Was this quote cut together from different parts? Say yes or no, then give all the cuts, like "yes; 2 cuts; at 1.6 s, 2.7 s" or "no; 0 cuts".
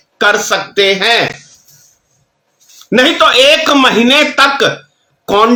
no; 0 cuts